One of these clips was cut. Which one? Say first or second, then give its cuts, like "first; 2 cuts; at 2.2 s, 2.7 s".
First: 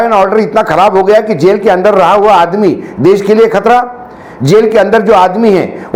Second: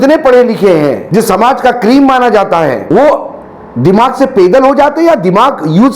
second; 2 cuts; at 1.0 s, 2.8 s